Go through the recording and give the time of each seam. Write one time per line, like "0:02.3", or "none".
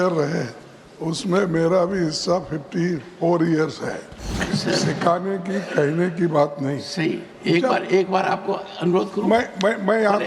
0:04.4